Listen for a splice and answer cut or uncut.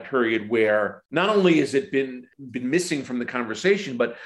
cut